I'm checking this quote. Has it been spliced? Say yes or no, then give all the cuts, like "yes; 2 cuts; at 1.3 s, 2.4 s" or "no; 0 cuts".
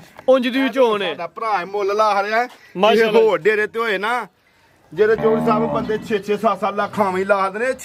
no; 0 cuts